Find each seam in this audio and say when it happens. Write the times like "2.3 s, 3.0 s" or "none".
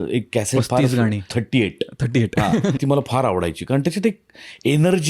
1.3 s, 2.8 s